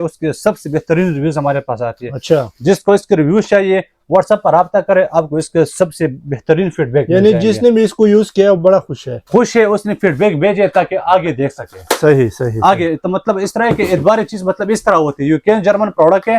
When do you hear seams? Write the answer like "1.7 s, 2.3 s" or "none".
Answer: none